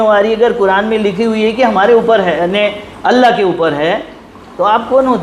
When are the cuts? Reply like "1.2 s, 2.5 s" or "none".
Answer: none